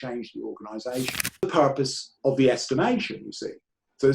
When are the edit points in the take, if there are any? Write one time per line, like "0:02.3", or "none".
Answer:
0:01.5

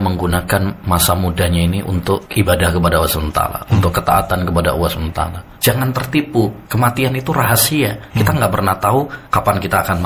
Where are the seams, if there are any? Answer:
0:02.3
0:05.5
0:06.6
0:08.0
0:09.2

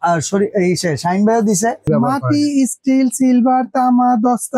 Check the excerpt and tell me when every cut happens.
0:01.9

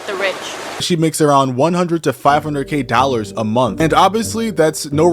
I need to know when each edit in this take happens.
0:00.8
0:03.7

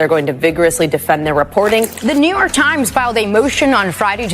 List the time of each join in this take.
0:01.9

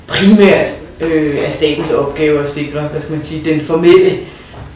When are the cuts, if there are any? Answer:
none

